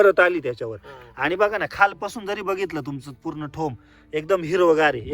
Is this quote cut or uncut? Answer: cut